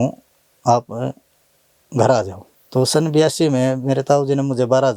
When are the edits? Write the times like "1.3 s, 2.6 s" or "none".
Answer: 2.4 s